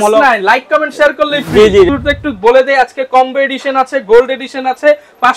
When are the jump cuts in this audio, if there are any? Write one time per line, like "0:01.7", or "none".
0:01.9